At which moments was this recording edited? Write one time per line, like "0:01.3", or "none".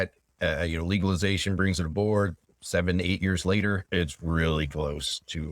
0:02.4
0:03.8